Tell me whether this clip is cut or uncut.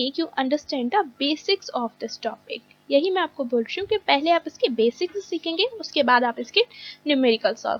uncut